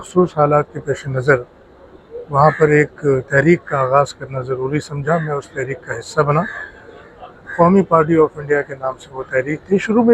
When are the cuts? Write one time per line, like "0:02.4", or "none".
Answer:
none